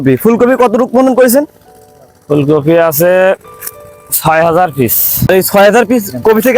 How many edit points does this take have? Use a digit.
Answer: 1